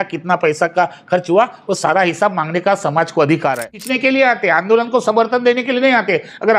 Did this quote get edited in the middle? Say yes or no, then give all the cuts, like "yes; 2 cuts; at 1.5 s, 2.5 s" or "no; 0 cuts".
yes; 1 cut; at 3.8 s